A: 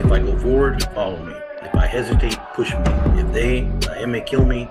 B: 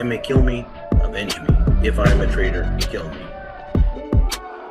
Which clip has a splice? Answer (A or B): B